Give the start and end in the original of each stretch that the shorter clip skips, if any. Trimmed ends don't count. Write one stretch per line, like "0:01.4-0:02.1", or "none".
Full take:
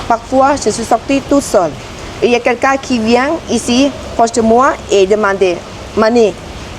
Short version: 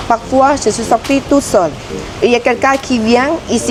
none